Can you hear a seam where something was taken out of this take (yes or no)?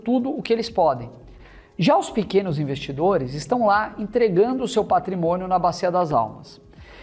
no